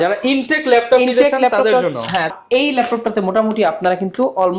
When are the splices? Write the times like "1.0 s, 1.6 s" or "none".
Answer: 2.4 s